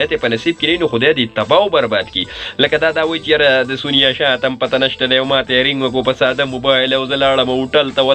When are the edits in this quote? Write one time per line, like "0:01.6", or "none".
none